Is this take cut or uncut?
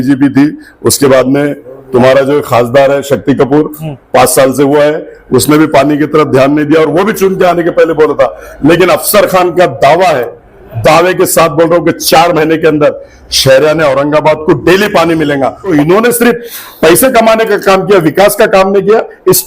cut